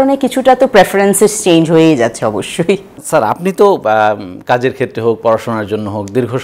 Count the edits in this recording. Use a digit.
0